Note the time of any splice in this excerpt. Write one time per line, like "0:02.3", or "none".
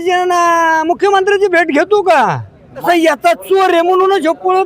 0:02.8